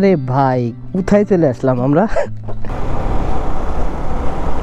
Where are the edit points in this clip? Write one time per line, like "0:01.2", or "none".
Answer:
0:02.6